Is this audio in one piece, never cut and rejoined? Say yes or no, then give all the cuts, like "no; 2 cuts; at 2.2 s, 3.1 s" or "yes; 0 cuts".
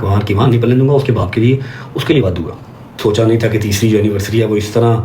no; 1 cut; at 2.9 s